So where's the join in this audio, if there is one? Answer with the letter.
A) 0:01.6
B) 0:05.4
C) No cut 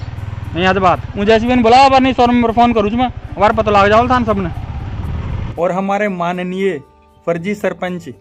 B